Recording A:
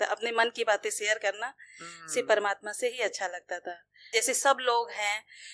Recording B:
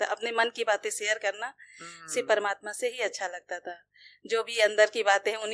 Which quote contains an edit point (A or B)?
A